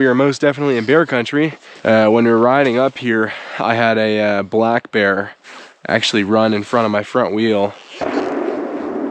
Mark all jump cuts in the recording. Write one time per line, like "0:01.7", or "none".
0:01.7
0:07.9